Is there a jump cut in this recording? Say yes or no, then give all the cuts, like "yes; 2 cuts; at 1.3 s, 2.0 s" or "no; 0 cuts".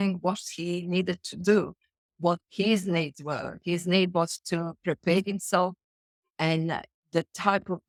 no; 0 cuts